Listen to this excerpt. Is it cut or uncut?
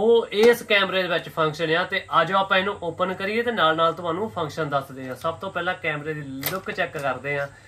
uncut